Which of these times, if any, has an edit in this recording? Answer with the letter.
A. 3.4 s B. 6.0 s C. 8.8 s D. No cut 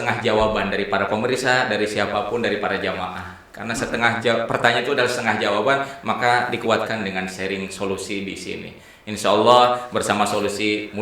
D